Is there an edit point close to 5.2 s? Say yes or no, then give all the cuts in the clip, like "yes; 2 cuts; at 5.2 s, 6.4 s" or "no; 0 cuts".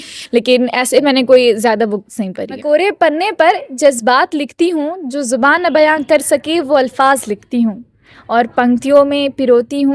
no; 1 cut; at 2.6 s